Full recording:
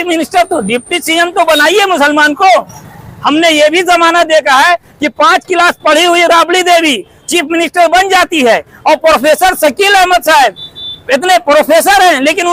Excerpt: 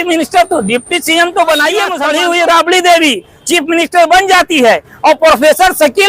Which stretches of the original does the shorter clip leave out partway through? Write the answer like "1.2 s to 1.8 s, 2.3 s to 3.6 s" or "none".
2.0 s to 5.9 s